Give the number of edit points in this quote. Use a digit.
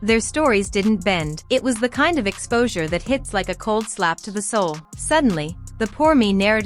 2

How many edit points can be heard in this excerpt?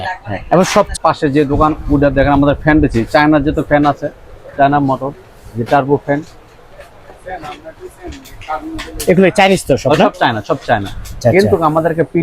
2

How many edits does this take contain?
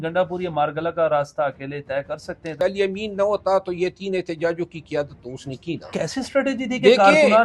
2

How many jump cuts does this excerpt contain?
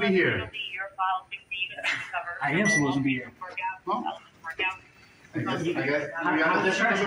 0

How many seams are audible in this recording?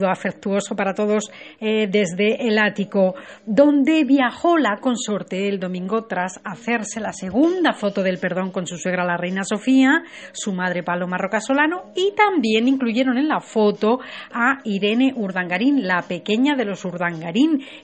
0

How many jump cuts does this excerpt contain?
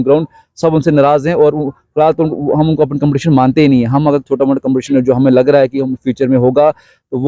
0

